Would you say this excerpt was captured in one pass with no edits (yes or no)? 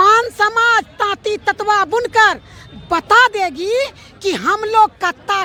yes